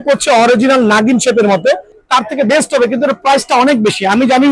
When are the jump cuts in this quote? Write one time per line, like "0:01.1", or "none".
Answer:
0:01.9